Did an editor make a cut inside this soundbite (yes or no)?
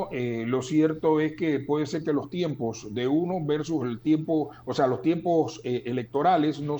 no